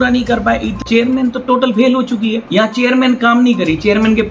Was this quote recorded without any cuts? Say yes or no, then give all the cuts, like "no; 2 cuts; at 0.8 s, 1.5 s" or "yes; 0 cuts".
no; 2 cuts; at 0.8 s, 2.4 s